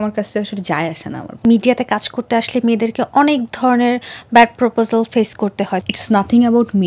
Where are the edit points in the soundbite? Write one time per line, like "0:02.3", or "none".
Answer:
0:01.4
0:05.8